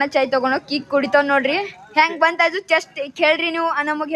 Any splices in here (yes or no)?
no